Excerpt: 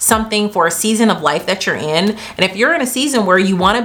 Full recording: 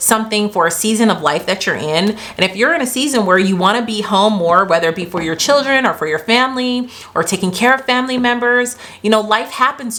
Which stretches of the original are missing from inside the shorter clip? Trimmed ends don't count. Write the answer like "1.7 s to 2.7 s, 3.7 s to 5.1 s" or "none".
none